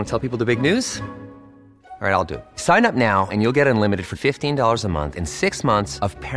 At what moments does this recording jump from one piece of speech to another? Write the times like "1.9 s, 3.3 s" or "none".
none